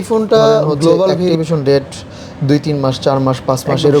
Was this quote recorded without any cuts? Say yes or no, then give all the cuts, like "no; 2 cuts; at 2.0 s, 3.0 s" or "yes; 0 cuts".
no; 1 cut; at 1.3 s